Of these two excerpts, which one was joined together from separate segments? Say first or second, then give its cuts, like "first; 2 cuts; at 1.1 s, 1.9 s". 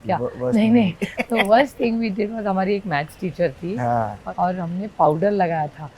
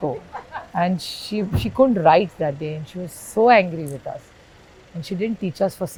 first; 1 cut; at 4.2 s